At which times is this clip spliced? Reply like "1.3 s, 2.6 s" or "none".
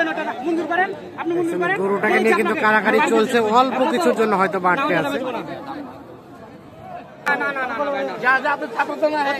7.3 s